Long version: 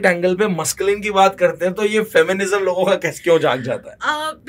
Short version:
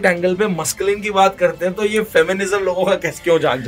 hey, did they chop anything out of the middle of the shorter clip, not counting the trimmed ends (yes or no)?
no